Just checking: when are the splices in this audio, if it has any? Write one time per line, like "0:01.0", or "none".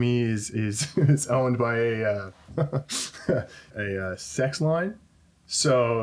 0:03.7